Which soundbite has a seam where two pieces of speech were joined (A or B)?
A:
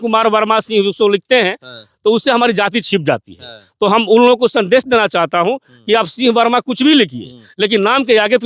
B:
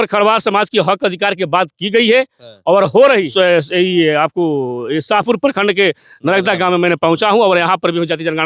B